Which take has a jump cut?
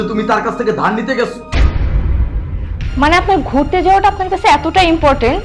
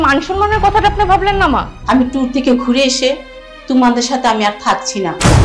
second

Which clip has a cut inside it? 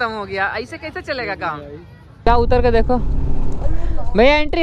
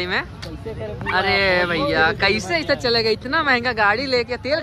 first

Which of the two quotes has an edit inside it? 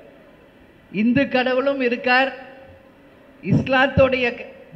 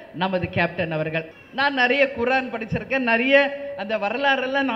second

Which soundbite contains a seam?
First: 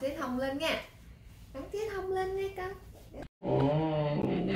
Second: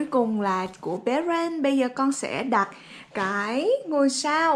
first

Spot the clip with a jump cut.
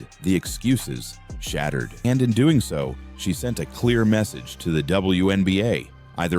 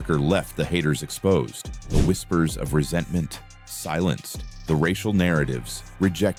first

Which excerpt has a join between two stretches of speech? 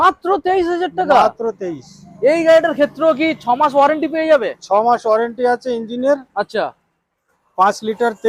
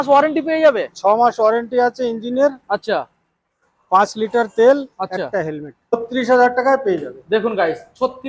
second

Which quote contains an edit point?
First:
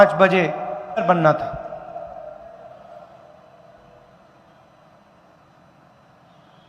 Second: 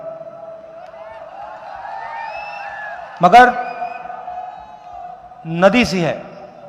first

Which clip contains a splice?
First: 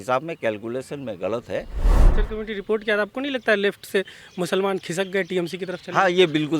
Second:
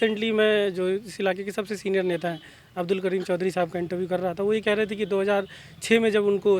first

